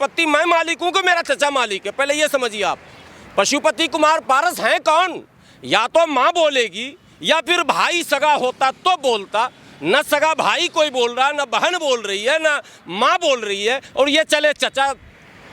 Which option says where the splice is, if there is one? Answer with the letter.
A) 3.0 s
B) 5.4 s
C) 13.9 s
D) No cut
D